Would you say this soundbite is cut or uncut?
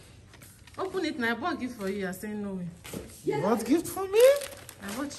uncut